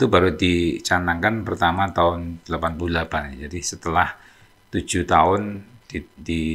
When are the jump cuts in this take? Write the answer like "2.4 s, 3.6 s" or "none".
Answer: none